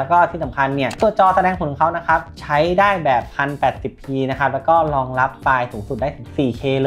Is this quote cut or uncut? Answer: uncut